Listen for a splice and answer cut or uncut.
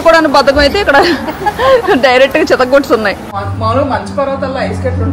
cut